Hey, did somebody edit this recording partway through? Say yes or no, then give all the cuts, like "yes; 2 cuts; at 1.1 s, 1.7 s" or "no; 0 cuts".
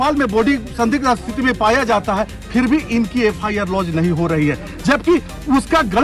no; 0 cuts